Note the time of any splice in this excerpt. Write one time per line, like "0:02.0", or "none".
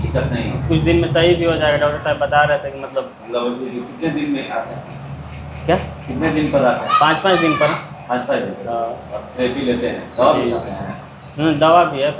none